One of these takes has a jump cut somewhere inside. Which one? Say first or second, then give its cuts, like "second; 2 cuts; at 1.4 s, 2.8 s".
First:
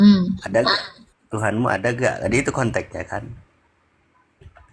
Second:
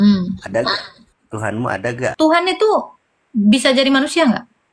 second; 1 cut; at 2.1 s